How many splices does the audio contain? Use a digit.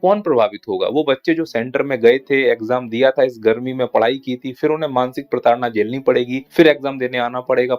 1